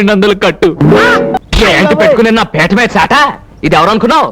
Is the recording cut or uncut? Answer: cut